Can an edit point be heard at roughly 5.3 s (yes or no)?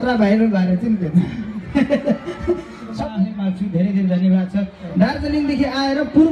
no